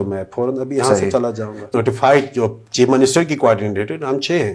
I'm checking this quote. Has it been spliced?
yes; 1 cut; at 1.7 s

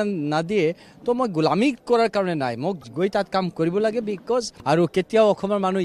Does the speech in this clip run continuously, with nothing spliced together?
no; 1 cut; at 4.5 s

